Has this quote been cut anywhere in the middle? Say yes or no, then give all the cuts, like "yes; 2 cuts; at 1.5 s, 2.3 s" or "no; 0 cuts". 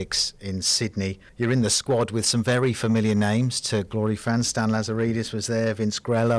yes; 1 cut; at 1.2 s